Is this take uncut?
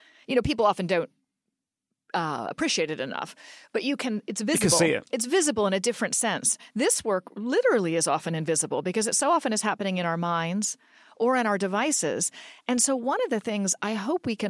yes; 0 cuts

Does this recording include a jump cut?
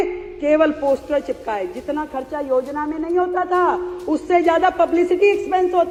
no; 0 cuts

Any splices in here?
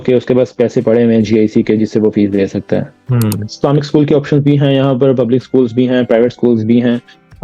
yes; 1 cut; at 3.4 s

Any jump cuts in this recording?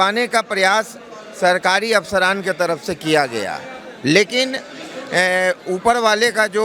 no; 0 cuts

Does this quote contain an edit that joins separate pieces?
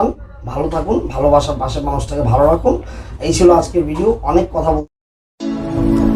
yes; 1 cut; at 4.8 s

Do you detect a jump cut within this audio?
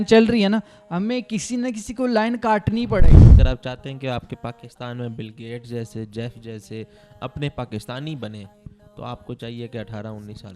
yes; 1 cut; at 3.2 s

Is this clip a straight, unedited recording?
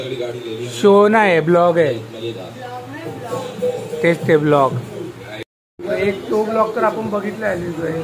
no; 1 cut; at 5.3 s

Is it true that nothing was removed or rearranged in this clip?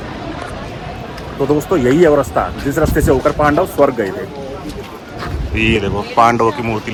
yes; 0 cuts

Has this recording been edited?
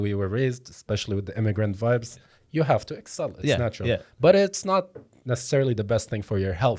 no; 0 cuts

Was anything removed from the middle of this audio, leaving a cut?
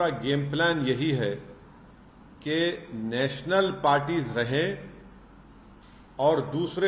no; 0 cuts

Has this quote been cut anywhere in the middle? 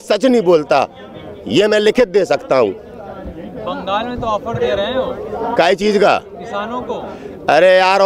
no; 0 cuts

